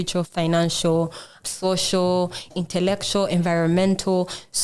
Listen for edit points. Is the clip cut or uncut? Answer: cut